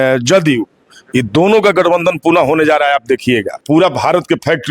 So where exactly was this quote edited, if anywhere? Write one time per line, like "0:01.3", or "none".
0:03.6